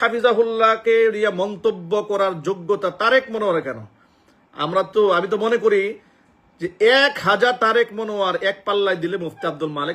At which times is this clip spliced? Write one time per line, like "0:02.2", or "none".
none